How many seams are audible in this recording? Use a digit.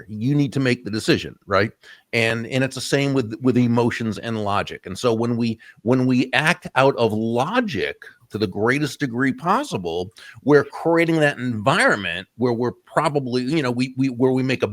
0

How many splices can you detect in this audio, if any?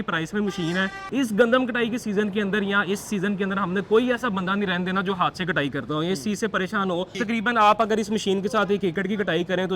2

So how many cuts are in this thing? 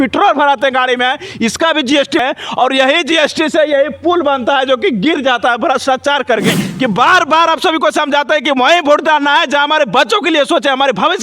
2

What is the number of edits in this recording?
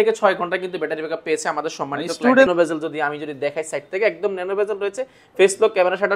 1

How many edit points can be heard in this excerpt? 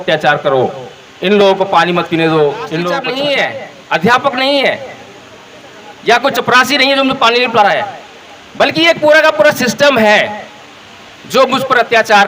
1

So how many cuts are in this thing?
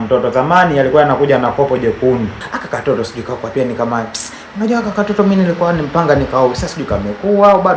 1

